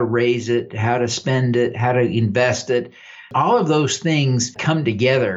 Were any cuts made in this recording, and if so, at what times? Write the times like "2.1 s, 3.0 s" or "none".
3.3 s, 4.5 s